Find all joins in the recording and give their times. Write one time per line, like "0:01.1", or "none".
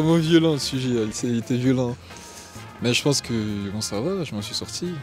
none